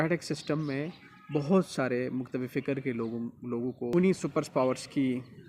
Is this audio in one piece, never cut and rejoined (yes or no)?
no